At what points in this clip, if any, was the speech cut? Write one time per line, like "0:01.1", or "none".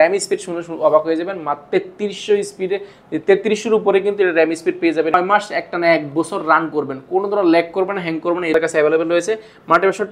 0:05.1
0:08.5